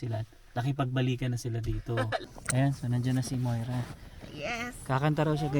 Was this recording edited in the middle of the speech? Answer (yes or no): yes